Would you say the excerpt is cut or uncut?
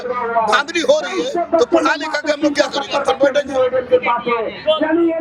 uncut